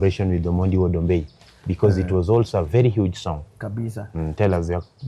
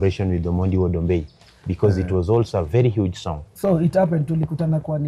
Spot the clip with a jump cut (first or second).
second